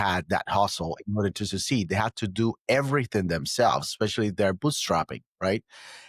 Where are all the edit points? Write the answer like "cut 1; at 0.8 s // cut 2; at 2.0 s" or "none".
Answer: none